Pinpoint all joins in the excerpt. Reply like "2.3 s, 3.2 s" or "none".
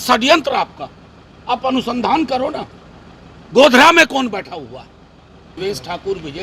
5.4 s